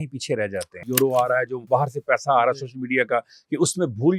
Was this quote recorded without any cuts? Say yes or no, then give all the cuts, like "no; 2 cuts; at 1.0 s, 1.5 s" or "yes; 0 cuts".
no; 2 cuts; at 0.8 s, 1.6 s